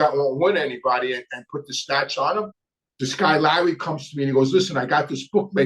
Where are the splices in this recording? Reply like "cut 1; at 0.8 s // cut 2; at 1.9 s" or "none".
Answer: cut 1; at 2.6 s